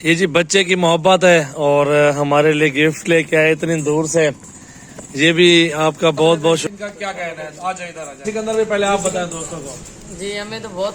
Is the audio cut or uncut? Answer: cut